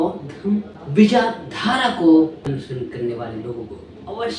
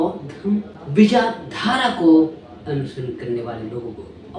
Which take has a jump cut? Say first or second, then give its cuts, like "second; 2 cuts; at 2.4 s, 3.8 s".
first; 1 cut; at 2.5 s